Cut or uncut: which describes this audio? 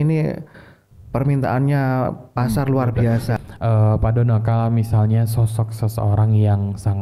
cut